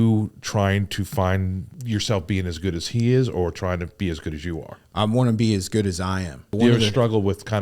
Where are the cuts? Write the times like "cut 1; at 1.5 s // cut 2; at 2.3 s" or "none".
cut 1; at 1.7 s // cut 2; at 6.5 s

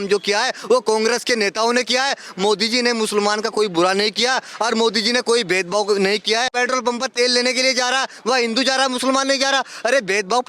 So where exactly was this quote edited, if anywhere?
cut 1; at 6.5 s

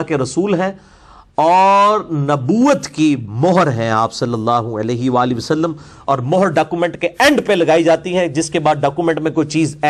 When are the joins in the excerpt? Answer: none

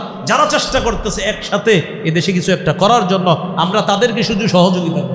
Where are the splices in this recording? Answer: none

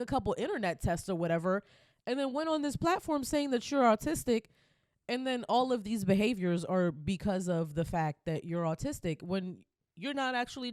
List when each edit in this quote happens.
none

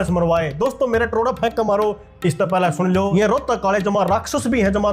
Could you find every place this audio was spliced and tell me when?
cut 1; at 3.1 s

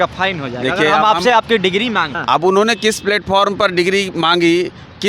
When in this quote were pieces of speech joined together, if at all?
cut 1; at 2.1 s

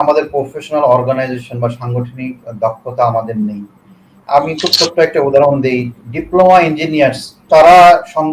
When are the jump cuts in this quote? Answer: cut 1; at 7.4 s

